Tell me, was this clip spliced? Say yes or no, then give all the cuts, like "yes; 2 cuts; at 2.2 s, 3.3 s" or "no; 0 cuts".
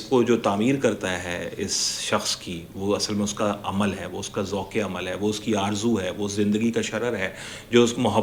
no; 0 cuts